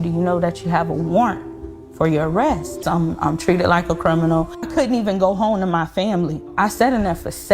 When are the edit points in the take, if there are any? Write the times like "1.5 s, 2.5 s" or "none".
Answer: 2.8 s, 4.7 s